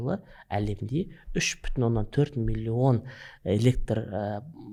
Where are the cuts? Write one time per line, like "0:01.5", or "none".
none